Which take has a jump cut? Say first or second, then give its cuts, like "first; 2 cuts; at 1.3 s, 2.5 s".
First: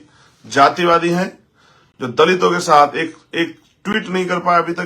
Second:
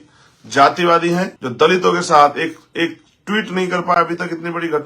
second; 1 cut; at 1.4 s